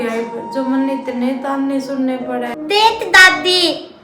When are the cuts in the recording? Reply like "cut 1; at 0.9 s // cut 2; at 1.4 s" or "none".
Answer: cut 1; at 2.5 s